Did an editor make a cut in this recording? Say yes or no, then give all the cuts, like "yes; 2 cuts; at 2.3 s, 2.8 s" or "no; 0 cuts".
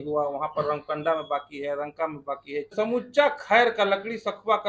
yes; 1 cut; at 2.7 s